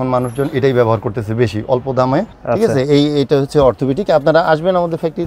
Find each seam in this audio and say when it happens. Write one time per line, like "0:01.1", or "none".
0:02.4

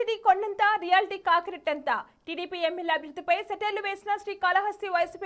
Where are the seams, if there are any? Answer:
none

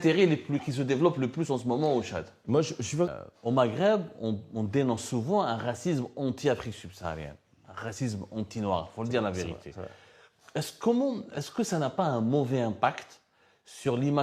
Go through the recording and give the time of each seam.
0:02.8

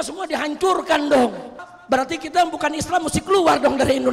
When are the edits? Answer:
0:01.7

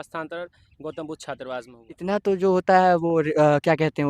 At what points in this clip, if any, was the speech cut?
0:01.8

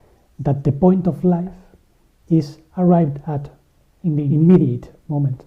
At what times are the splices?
0:04.2

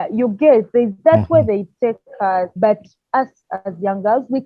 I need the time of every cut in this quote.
0:02.5

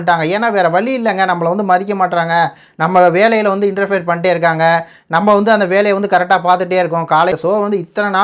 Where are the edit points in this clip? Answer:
0:07.3

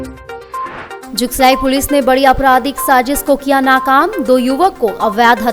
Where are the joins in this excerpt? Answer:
0:01.0

